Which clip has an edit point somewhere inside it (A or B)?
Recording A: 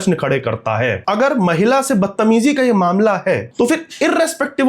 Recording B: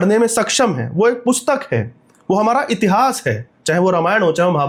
A